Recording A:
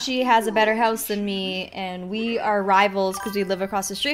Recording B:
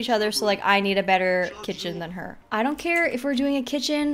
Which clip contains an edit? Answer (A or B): B